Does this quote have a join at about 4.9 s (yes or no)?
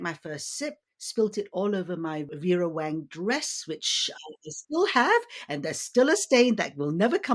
no